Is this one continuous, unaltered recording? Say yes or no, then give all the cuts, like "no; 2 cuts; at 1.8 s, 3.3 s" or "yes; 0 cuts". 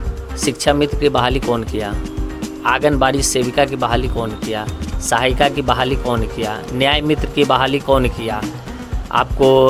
yes; 0 cuts